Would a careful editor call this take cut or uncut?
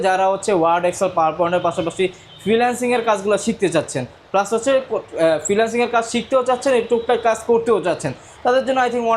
uncut